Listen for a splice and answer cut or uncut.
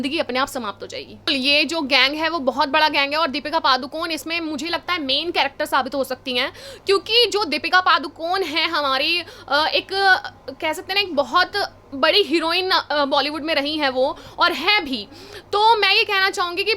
cut